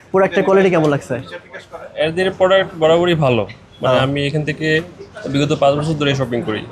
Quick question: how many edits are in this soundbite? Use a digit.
0